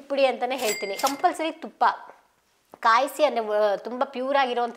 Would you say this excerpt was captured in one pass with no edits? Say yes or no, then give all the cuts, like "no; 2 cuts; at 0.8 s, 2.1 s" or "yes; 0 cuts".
no; 1 cut; at 1.0 s